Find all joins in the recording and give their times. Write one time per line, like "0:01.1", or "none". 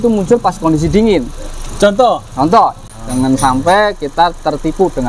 0:03.0